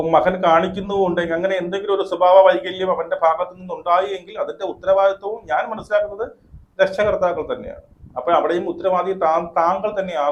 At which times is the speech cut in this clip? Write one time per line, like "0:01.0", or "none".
none